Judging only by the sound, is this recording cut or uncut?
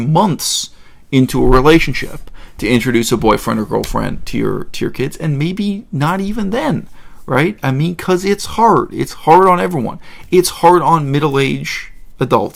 uncut